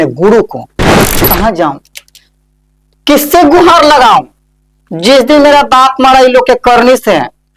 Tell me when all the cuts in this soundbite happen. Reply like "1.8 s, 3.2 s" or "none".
1.2 s